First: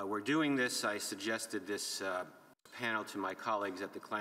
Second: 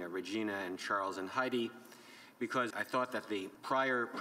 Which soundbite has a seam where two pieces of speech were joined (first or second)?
second